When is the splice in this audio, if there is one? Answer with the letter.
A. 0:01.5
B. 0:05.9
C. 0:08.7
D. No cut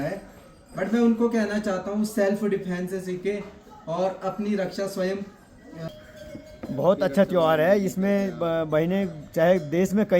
B